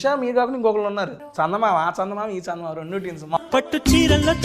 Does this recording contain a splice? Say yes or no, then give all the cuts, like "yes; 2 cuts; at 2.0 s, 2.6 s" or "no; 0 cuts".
yes; 2 cuts; at 1.2 s, 3.4 s